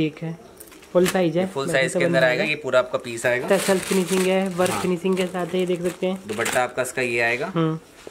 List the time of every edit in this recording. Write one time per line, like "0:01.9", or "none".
none